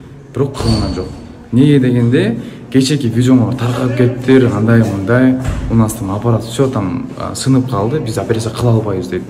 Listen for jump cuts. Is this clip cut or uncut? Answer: uncut